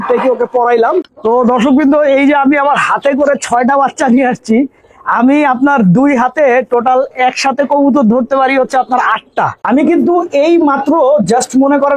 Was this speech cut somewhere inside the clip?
yes; 2 cuts; at 1.0 s, 9.6 s

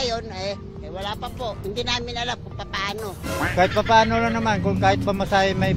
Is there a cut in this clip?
no; 0 cuts

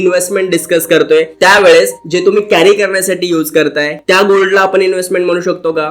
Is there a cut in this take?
yes; 1 cut; at 4.0 s

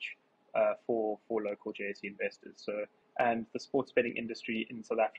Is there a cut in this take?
yes; 1 cut; at 3.0 s

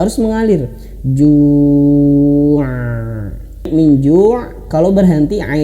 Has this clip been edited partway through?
yes; 1 cut; at 3.7 s

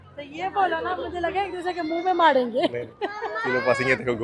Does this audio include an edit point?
no; 0 cuts

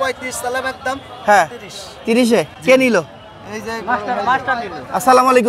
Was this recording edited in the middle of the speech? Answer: no; 0 cuts

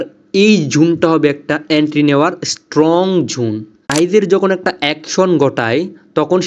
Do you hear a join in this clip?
yes; 1 cut; at 3.7 s

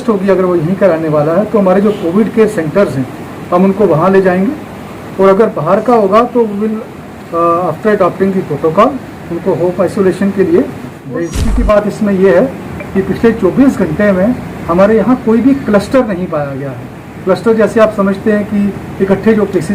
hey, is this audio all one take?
no; 1 cut; at 11.2 s

